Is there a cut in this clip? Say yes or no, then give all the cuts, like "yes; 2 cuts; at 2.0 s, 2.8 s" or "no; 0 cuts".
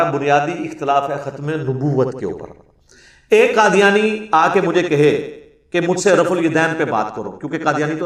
no; 0 cuts